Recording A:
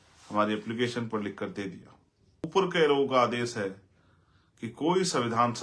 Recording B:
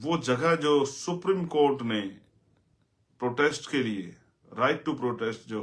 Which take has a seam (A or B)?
A